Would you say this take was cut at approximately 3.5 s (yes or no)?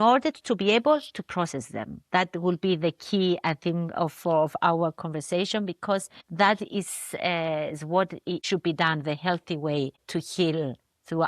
no